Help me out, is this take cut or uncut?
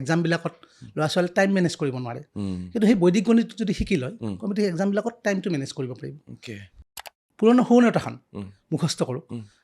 cut